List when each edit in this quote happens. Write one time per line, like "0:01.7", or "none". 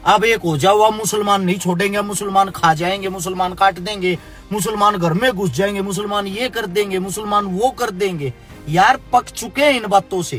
none